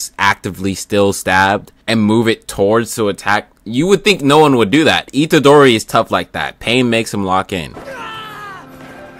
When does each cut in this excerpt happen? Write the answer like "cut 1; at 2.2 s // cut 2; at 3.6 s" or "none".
none